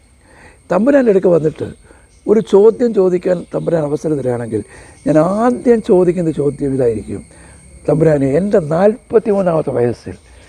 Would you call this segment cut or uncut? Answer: uncut